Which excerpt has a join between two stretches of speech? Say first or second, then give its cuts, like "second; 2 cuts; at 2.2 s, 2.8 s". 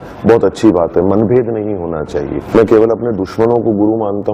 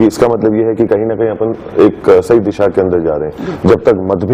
first; 1 cut; at 2.4 s